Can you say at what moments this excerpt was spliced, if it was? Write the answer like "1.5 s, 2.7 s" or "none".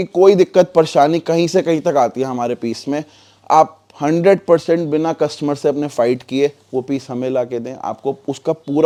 none